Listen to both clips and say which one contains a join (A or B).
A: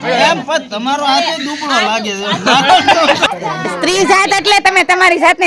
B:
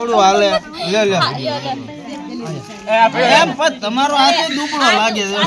A